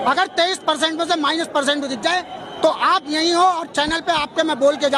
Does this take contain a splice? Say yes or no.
no